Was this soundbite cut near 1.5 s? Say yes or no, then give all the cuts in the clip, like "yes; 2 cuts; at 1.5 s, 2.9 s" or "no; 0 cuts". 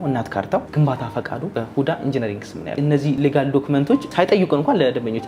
yes; 3 cuts; at 1.5 s, 3.0 s, 4.1 s